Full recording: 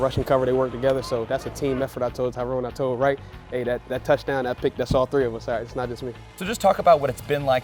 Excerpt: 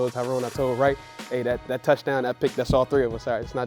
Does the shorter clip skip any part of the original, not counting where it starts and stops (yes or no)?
no